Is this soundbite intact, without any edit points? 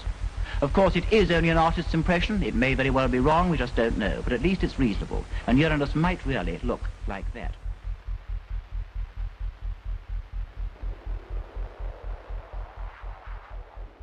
yes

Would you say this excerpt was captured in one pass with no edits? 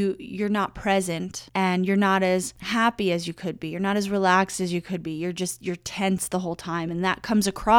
no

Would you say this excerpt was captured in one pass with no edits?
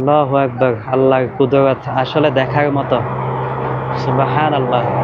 yes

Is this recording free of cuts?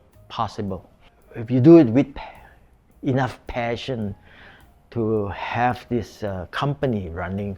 yes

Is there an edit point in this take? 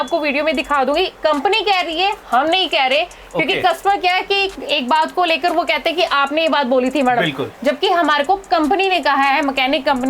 no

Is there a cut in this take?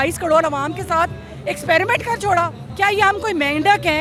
no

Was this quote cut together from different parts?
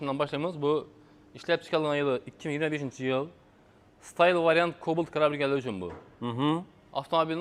no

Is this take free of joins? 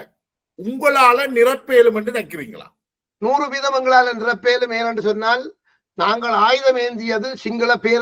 yes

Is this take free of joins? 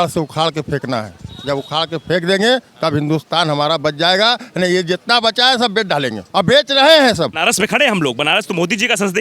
no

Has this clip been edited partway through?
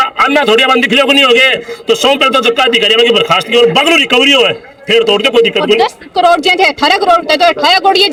no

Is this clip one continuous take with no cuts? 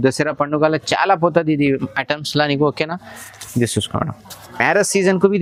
yes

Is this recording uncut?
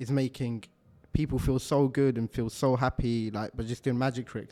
yes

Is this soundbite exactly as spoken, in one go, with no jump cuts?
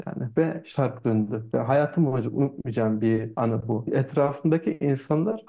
yes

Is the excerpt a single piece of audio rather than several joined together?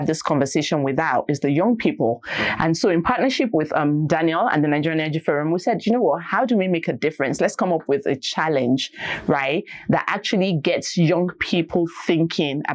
yes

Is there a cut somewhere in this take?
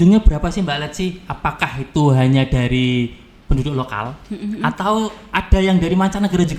no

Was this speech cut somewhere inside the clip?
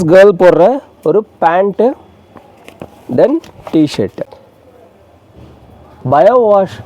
yes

